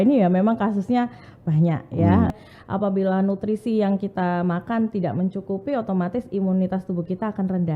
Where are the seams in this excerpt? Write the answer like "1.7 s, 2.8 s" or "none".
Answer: 2.3 s